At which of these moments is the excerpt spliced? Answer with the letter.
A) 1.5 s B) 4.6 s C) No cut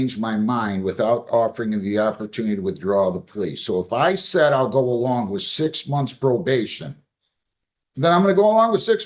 C